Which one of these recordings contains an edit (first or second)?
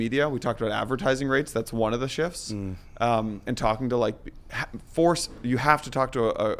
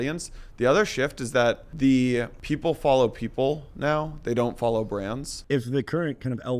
second